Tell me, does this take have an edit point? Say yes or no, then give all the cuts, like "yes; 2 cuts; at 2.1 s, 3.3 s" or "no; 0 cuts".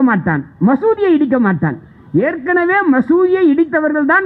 no; 0 cuts